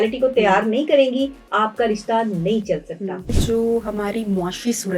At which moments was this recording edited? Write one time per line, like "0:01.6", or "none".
0:03.3